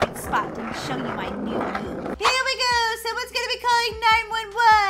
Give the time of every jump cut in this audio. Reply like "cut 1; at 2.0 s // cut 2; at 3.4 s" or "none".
cut 1; at 2.1 s